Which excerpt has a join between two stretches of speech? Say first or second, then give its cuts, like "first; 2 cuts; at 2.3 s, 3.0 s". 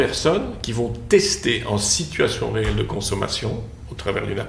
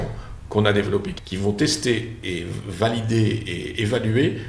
second; 2 cuts; at 1.2 s, 2.2 s